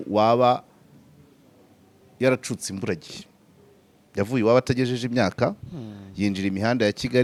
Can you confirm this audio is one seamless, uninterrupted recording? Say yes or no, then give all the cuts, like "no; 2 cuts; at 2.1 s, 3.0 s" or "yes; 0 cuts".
yes; 0 cuts